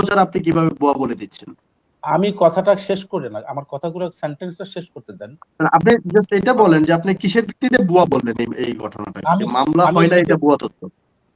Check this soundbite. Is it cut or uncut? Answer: uncut